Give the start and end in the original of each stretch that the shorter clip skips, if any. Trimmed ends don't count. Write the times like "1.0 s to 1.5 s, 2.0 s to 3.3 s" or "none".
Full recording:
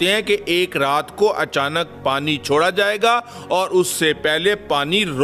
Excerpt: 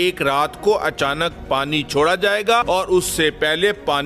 3.2 s to 3.5 s